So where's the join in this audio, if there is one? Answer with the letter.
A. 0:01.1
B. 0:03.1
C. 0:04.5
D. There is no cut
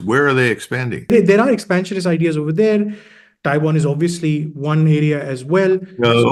A